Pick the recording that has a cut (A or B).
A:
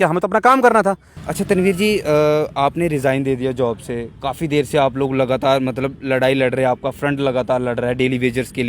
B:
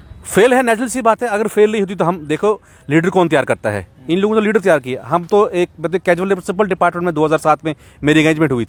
A